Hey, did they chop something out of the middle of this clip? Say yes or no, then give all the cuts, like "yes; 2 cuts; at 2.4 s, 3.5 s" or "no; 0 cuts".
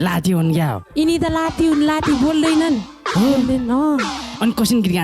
no; 0 cuts